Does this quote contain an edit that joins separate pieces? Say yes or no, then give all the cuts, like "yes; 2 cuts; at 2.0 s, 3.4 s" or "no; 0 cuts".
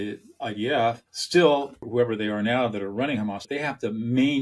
yes; 3 cuts; at 1.1 s, 1.8 s, 3.4 s